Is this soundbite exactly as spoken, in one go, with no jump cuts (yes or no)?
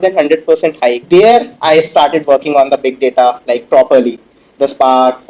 yes